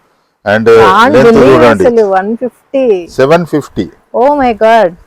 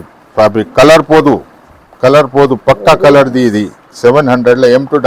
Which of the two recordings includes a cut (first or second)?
first